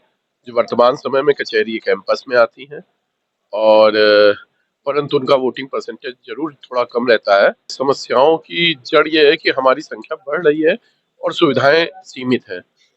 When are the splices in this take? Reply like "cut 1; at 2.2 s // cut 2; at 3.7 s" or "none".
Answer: cut 1; at 7.7 s